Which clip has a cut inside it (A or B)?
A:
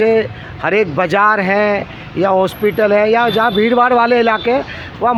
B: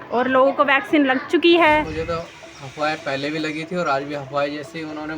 B